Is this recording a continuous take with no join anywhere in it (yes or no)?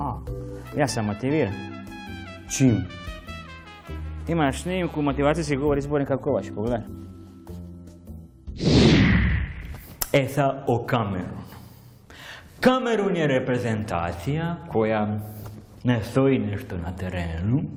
yes